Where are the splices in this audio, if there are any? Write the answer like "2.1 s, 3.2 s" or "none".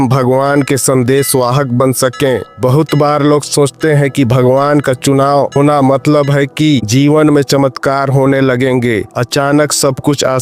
5.5 s, 6.9 s